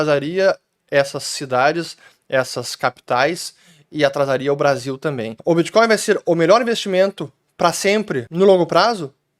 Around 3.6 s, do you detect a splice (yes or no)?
no